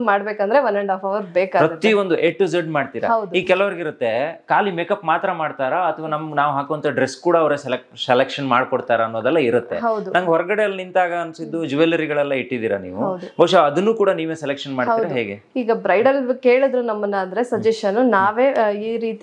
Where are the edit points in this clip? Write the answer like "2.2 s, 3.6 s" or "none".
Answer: none